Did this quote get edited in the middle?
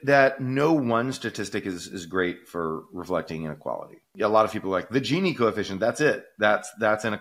yes; 1 cut; at 4.1 s

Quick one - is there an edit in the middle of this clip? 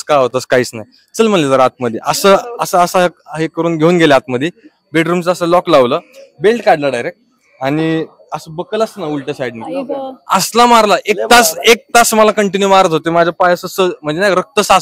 no; 0 cuts

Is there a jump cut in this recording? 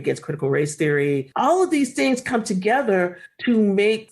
yes; 1 cut; at 1.3 s

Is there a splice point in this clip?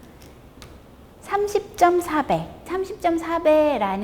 yes; 1 cut; at 2.7 s

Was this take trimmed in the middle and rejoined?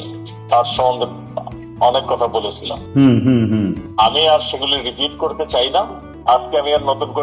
yes; 2 cuts; at 3.8 s, 6.0 s

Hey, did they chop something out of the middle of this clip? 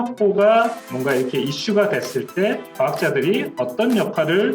no; 0 cuts

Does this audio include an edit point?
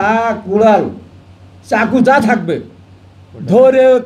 no; 0 cuts

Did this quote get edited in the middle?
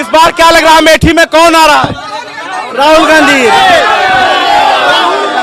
no; 0 cuts

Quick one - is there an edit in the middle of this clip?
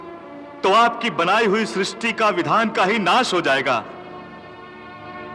no; 0 cuts

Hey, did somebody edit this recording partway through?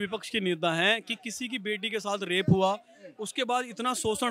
no; 0 cuts

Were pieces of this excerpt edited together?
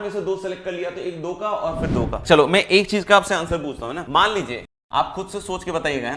yes; 3 cuts; at 2.2 s, 4.0 s, 4.7 s

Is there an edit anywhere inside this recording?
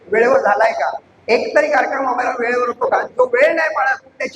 yes; 1 cut; at 1.1 s

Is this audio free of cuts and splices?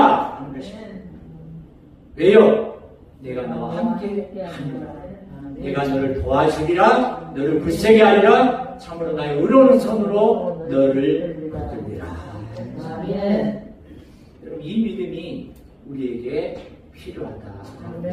yes; 0 cuts

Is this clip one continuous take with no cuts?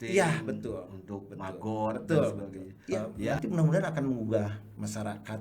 no; 1 cut; at 3.4 s

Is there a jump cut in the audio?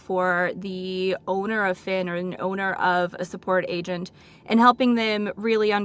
no; 0 cuts

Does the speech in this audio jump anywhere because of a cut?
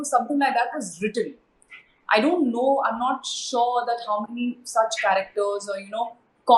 no; 0 cuts

